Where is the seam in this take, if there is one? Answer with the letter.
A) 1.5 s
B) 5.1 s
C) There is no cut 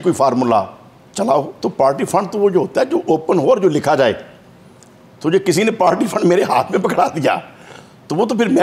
A